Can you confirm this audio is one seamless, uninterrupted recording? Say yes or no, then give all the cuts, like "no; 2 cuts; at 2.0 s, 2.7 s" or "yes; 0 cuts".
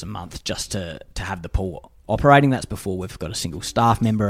yes; 0 cuts